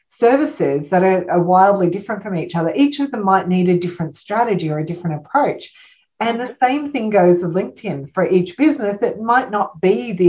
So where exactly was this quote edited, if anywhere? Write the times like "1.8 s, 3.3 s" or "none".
none

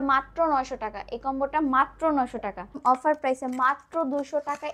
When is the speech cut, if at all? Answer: 2.8 s

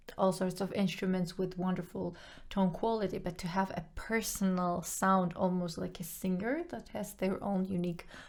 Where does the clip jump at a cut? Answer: none

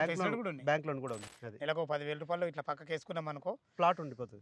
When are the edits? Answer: 1.3 s

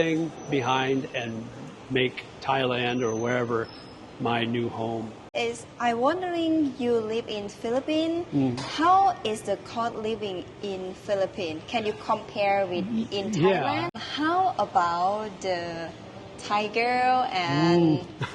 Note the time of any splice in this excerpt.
5.2 s, 13.9 s

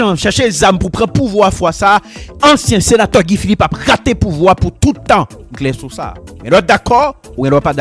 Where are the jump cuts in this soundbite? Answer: none

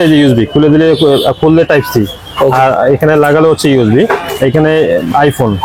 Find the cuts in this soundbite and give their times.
none

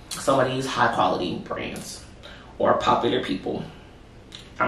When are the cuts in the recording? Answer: none

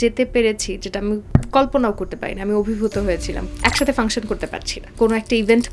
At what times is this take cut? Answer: 1.2 s, 3.4 s, 4.9 s

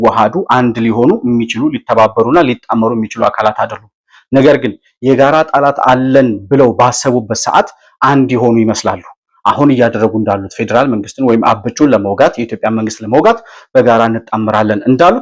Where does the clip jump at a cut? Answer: none

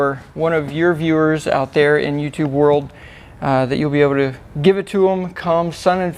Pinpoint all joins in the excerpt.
none

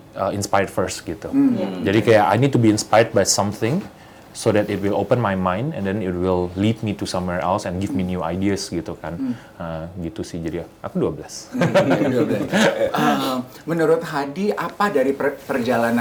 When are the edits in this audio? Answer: none

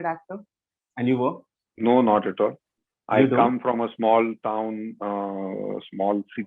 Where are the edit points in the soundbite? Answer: none

